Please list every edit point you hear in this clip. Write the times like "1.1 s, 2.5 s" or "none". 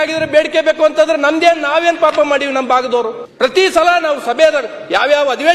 3.2 s

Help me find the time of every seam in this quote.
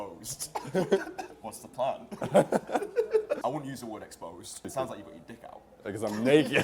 3.4 s, 4.6 s

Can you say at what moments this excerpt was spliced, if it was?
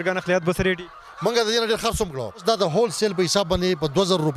2.4 s

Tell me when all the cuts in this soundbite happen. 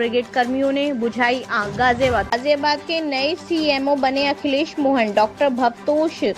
2.3 s

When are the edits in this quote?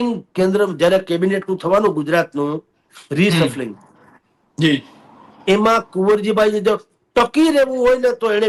none

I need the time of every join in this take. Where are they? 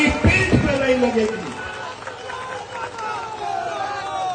none

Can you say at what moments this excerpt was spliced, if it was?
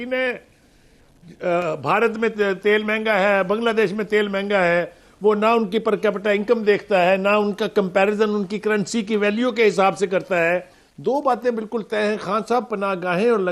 10.9 s

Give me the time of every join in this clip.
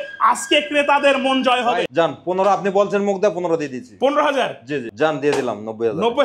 1.9 s, 4.9 s

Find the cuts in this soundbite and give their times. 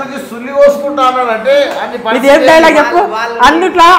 none

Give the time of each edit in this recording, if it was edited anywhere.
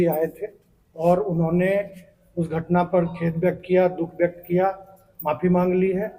none

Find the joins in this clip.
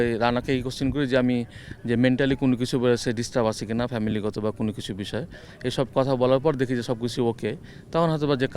none

